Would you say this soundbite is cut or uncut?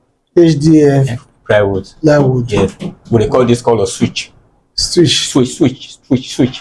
uncut